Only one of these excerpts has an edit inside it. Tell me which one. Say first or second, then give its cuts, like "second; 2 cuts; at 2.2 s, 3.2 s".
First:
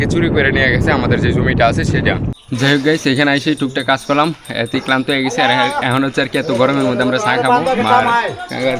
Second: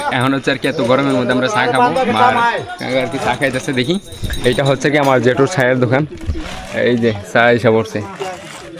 first; 1 cut; at 2.3 s